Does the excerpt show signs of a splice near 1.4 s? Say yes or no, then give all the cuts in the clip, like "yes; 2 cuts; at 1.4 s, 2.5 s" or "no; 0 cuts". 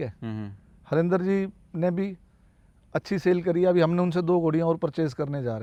no; 0 cuts